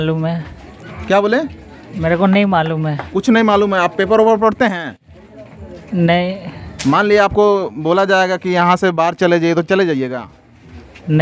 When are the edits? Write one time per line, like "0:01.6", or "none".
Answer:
none